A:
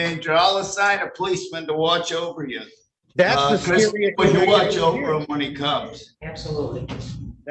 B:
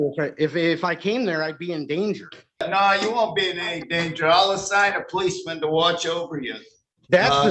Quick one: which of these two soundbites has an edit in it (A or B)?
B